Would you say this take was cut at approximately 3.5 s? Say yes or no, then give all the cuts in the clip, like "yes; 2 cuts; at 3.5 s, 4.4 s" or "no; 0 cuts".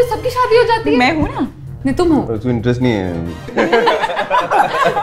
yes; 2 cuts; at 2.3 s, 3.5 s